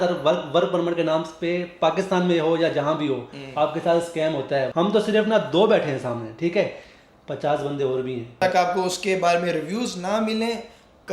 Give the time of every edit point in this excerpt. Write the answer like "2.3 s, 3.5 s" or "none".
4.7 s, 8.4 s